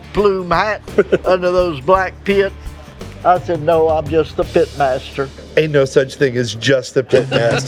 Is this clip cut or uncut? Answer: uncut